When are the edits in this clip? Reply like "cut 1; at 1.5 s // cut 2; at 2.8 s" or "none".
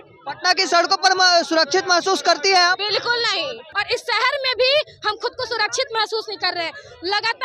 cut 1; at 3.7 s